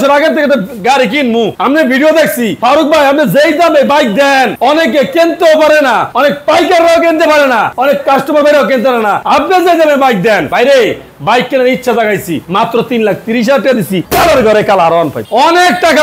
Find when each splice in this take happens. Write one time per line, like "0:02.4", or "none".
0:06.1
0:07.7
0:09.2
0:10.5
0:12.4
0:14.0
0:15.2